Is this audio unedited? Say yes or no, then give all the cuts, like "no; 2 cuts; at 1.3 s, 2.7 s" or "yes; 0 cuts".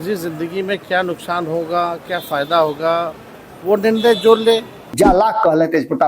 no; 1 cut; at 4.9 s